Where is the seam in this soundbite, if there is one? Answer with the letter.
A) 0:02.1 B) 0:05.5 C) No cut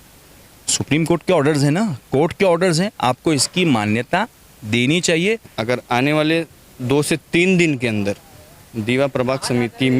B